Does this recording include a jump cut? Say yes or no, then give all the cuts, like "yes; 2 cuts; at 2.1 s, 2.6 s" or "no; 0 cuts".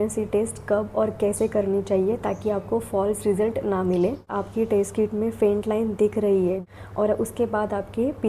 yes; 2 cuts; at 4.3 s, 6.6 s